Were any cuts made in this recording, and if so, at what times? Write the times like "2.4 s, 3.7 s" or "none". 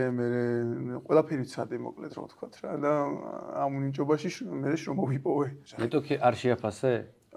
5.6 s